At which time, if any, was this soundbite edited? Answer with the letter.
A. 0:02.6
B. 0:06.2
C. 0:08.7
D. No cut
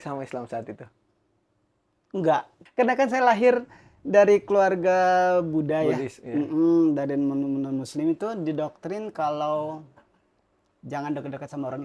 A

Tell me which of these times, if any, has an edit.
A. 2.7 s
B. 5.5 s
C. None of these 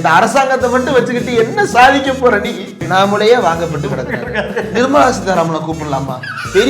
A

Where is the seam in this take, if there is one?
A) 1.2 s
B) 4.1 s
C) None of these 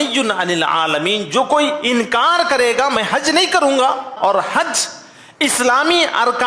B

